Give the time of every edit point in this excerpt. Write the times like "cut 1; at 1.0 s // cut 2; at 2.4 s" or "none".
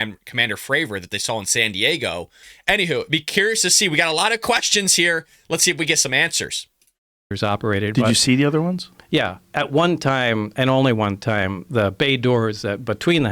cut 1; at 2.5 s